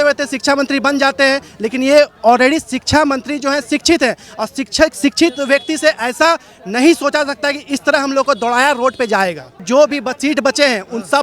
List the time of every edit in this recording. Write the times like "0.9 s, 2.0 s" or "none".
9.6 s